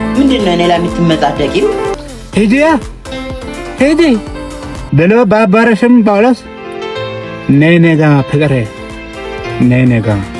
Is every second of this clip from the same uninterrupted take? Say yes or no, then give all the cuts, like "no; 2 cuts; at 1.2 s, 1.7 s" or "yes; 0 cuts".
yes; 0 cuts